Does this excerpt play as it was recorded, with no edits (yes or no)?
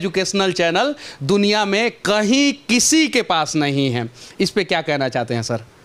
yes